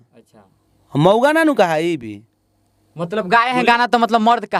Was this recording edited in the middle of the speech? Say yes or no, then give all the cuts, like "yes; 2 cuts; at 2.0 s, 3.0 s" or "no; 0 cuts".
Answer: no; 0 cuts